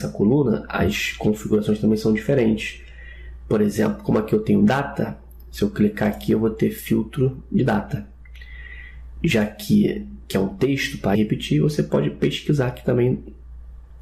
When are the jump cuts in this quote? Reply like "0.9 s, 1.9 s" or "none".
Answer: none